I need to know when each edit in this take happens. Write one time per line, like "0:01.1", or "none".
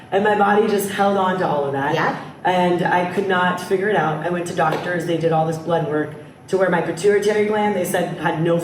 none